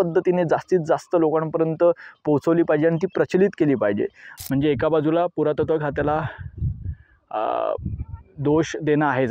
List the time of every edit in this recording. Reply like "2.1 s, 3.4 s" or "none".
4.3 s